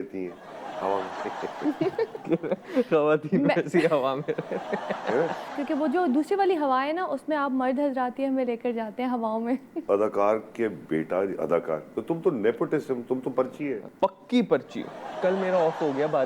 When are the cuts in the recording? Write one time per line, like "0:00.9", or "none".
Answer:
0:02.2
0:05.6
0:09.9
0:13.8
0:15.2

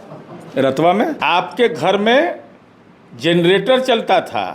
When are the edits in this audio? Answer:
0:01.2

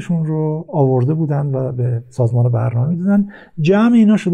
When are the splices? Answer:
none

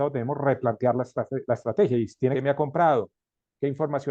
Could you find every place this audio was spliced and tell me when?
0:02.3

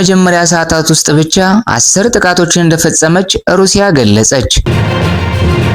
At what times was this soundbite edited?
0:04.6

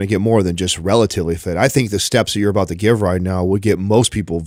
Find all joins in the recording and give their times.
none

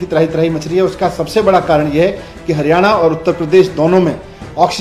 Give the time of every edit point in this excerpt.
none

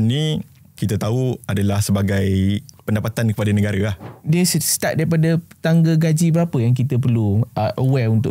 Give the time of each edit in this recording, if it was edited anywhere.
0:00.8
0:02.7
0:04.1

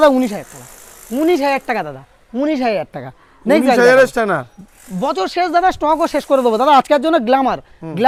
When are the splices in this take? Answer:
none

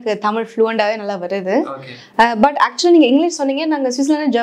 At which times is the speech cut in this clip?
none

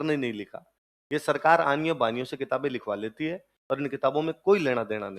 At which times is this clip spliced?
none

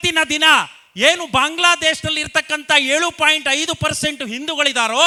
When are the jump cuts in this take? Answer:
none

